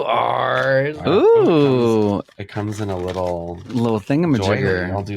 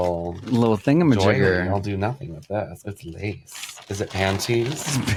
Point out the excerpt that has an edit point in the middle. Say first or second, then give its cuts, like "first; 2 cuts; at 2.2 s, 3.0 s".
first; 1 cut; at 0.9 s